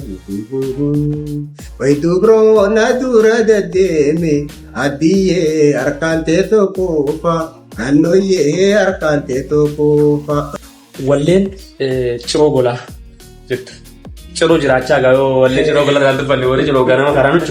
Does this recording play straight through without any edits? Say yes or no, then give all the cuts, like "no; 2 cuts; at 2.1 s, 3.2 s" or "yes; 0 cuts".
no; 1 cut; at 10.6 s